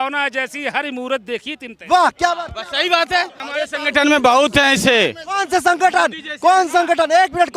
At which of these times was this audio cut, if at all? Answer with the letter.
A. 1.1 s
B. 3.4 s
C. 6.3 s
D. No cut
B